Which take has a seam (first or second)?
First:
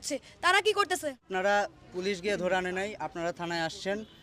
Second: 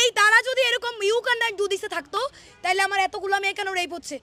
first